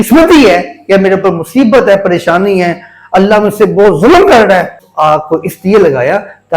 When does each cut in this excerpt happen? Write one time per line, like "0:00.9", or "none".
0:04.9